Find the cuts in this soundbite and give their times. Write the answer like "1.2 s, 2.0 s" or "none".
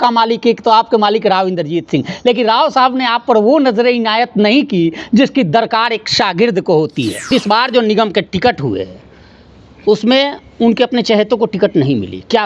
7.3 s

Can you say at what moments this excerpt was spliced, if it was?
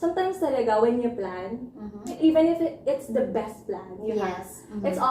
2.2 s

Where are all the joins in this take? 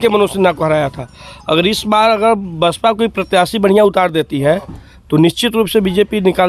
none

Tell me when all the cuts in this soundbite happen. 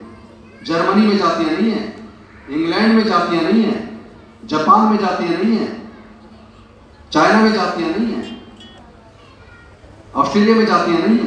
none

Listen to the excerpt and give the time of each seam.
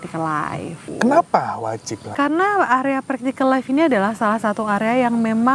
0.9 s, 2.1 s

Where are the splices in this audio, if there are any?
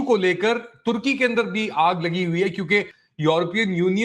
3.0 s

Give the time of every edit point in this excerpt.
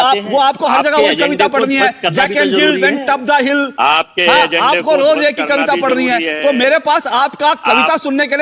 none

